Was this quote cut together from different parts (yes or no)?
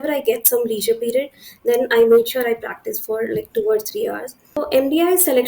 yes